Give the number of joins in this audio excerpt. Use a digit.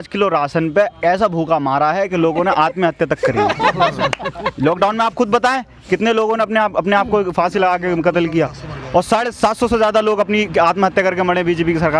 0